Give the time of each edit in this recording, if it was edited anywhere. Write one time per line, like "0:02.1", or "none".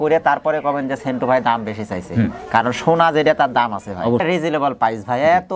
0:04.2